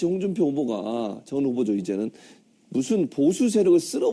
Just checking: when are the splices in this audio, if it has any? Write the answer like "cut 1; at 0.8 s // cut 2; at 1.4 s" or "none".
cut 1; at 1.7 s

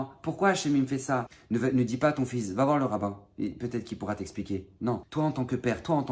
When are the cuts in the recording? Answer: cut 1; at 1.4 s // cut 2; at 5.1 s

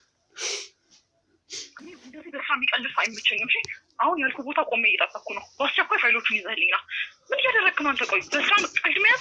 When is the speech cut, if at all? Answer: cut 1; at 1.8 s

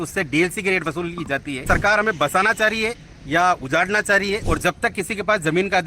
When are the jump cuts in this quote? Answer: cut 1; at 1.6 s // cut 2; at 4.4 s

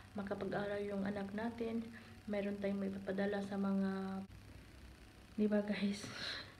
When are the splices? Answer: cut 1; at 4.2 s

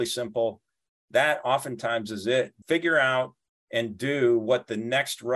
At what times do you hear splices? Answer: cut 1; at 2.6 s

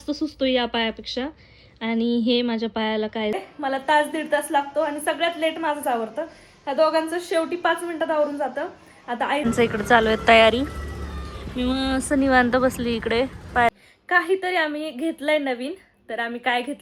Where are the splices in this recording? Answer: cut 1; at 3.4 s // cut 2; at 9.4 s // cut 3; at 13.7 s

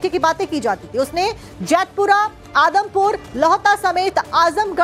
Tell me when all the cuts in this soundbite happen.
none

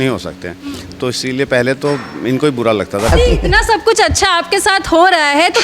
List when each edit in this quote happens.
cut 1; at 3.1 s

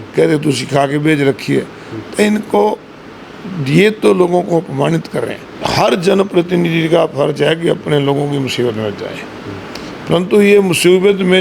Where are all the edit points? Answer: cut 1; at 5.5 s

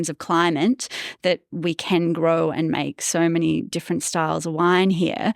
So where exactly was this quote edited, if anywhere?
none

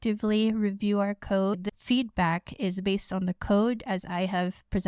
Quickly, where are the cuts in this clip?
cut 1; at 1.5 s

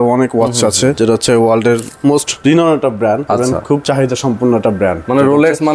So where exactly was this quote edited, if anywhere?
cut 1; at 0.9 s // cut 2; at 2.3 s // cut 3; at 3.4 s

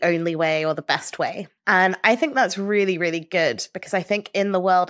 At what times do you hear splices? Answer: cut 1; at 1.5 s

